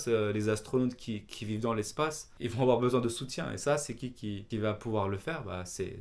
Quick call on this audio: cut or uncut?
cut